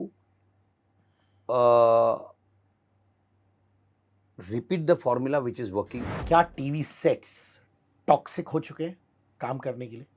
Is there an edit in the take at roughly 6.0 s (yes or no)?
yes